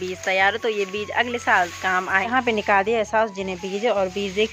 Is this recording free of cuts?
no; 1 cut; at 2.3 s

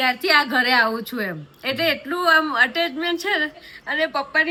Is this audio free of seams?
yes; 0 cuts

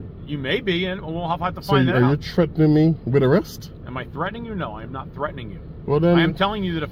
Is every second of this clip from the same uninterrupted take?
yes; 0 cuts

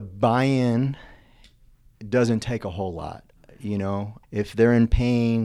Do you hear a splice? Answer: yes; 1 cut; at 4.2 s

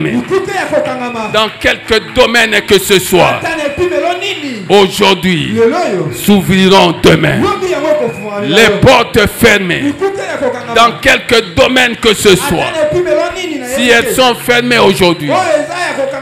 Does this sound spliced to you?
no; 0 cuts

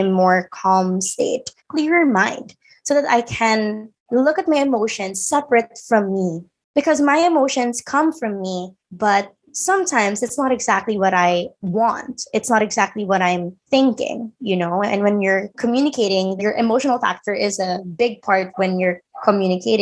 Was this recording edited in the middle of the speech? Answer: yes; 3 cuts; at 1.6 s, 15.5 s, 16.4 s

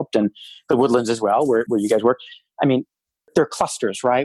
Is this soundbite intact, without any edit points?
no; 1 cut; at 1.7 s

